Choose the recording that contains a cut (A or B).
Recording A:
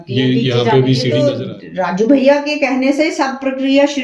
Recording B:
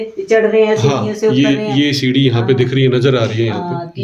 A